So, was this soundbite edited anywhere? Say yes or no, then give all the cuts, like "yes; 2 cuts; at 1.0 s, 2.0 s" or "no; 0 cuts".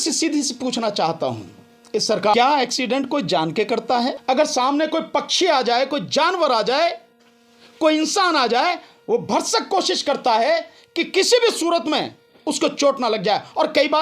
yes; 2 cuts; at 2.3 s, 4.2 s